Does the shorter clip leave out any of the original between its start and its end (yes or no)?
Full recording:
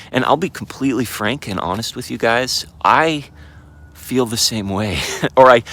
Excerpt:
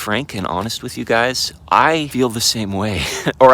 yes